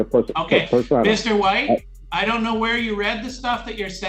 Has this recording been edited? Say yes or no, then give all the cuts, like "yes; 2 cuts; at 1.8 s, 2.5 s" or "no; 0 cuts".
yes; 1 cut; at 2.0 s